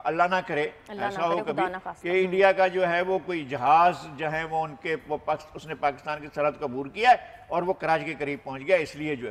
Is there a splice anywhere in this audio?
no; 0 cuts

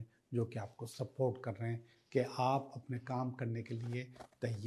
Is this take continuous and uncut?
yes; 0 cuts

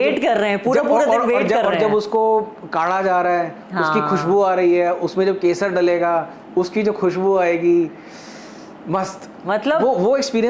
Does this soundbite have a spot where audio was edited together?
no; 0 cuts

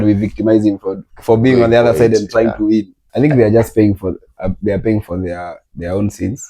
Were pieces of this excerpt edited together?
yes; 2 cuts; at 1.1 s, 3.1 s

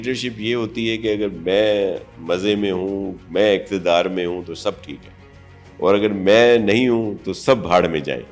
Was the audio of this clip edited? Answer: no; 0 cuts

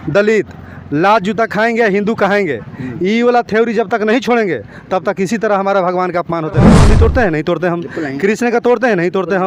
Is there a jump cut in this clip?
yes; 1 cut; at 6.7 s

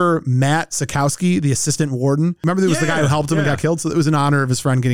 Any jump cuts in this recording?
yes; 1 cut; at 2.4 s

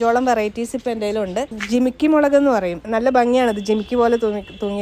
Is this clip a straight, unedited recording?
no; 2 cuts; at 1.5 s, 2.8 s

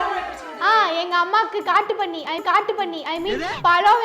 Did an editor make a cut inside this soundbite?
yes; 1 cut; at 2.3 s

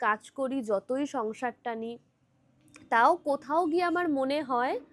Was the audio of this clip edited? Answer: no; 0 cuts

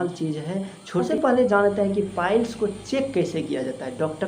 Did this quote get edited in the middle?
yes; 1 cut; at 1.1 s

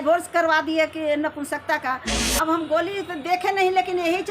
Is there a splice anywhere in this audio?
yes; 1 cut; at 2.1 s

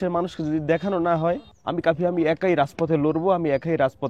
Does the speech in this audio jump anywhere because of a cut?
yes; 1 cut; at 1.5 s

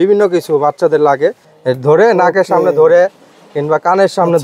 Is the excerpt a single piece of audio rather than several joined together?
no; 1 cut; at 1.5 s

